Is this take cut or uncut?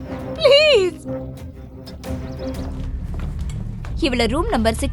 cut